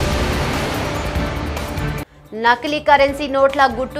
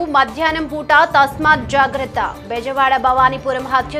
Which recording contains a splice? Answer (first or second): first